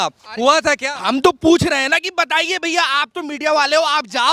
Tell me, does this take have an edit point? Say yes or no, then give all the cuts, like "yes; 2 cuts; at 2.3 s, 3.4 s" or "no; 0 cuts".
no; 0 cuts